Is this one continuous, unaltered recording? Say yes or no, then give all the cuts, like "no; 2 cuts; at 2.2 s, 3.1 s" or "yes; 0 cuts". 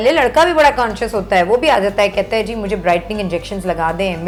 yes; 0 cuts